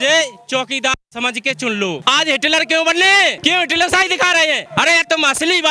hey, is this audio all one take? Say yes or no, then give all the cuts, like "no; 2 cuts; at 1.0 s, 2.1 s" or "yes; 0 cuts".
no; 3 cuts; at 2.0 s, 3.4 s, 4.6 s